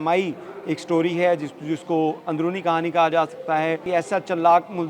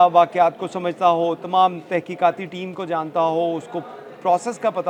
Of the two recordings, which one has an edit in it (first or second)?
first